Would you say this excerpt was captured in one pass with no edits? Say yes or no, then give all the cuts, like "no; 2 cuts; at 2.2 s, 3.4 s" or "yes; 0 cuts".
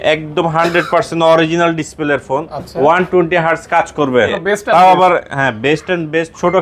no; 1 cut; at 4.4 s